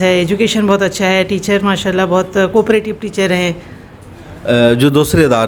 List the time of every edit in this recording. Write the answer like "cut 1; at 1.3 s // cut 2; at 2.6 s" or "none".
none